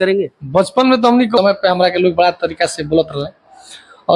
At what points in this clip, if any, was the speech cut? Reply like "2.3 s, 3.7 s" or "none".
1.4 s